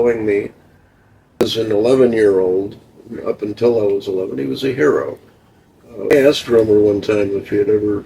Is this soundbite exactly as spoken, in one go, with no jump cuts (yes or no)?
no